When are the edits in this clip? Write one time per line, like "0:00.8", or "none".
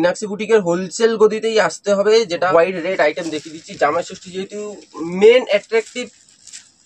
0:02.5